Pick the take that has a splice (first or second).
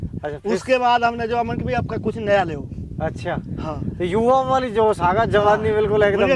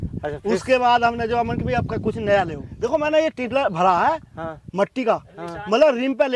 second